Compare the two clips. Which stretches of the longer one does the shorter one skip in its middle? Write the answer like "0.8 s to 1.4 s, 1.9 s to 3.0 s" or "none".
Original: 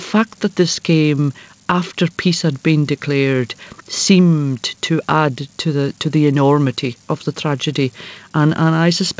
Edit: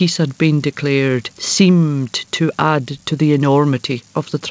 3.6 s to 3.9 s, 5.5 s to 6.0 s